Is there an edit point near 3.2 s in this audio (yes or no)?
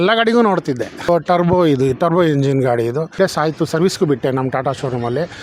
yes